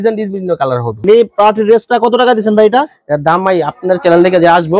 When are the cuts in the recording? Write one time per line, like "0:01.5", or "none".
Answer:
0:01.0